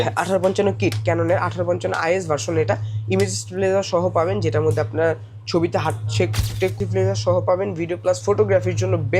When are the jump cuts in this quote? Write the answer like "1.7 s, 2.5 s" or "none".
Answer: 6.7 s